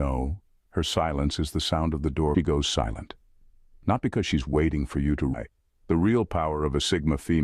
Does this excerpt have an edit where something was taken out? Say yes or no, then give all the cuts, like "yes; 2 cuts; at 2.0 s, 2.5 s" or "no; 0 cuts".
yes; 2 cuts; at 2.3 s, 5.3 s